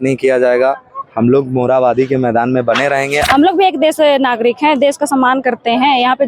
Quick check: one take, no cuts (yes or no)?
no